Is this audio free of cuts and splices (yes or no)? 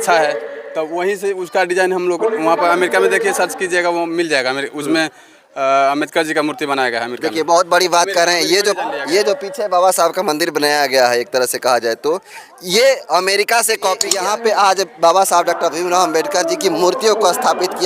no